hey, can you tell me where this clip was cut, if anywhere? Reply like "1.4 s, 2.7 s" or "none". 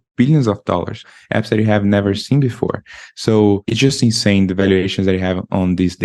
1.0 s, 3.7 s